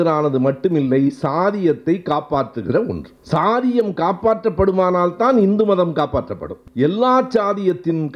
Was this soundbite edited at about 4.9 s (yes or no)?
no